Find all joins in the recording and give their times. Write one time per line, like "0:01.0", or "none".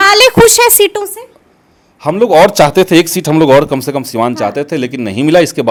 none